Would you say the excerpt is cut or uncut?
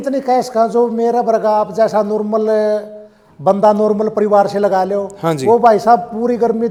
uncut